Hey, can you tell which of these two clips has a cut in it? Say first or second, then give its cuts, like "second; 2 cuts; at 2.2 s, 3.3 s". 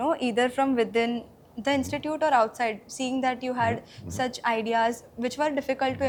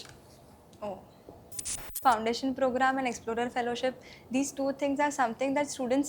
second; 1 cut; at 2.0 s